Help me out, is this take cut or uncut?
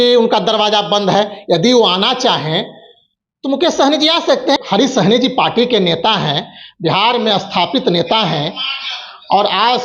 cut